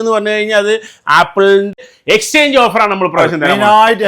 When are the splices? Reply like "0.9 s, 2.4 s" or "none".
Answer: 1.8 s